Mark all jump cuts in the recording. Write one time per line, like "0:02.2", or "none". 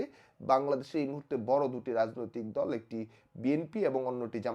none